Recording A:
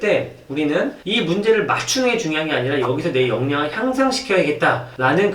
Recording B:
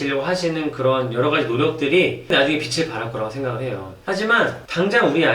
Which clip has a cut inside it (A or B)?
A